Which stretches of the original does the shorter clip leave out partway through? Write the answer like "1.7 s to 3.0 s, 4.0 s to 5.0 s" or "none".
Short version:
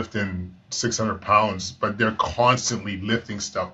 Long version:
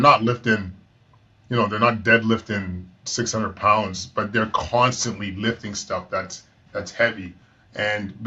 none